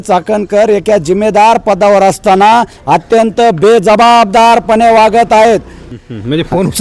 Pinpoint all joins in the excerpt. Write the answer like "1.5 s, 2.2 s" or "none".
5.8 s